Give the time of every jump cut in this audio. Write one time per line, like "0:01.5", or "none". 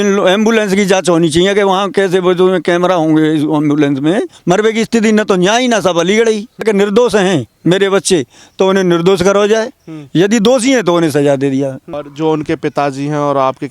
0:04.4
0:06.6
0:12.0